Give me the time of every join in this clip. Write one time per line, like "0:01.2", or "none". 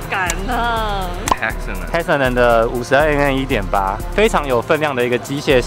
0:01.2